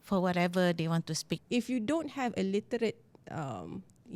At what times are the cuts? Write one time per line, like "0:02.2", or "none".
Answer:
0:01.3

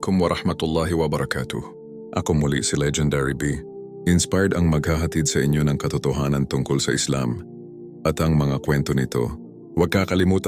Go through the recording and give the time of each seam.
0:01.9

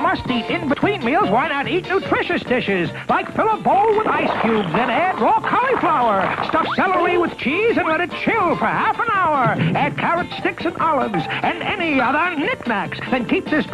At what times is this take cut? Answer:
none

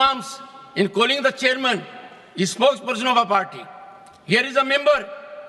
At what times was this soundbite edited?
none

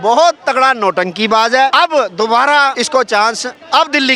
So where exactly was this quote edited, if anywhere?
0:01.7
0:02.8

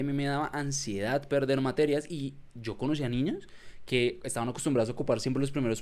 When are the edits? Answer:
none

